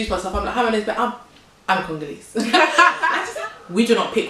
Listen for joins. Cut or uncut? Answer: cut